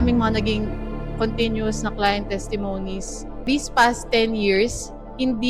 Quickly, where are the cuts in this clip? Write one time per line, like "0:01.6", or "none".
0:03.5